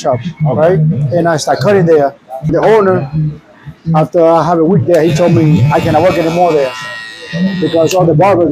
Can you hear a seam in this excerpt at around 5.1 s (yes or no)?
no